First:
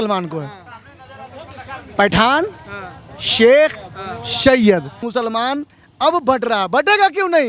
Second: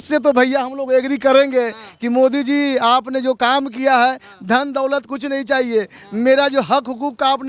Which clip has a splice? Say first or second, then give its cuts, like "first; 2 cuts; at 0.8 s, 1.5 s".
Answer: first; 1 cut; at 5.0 s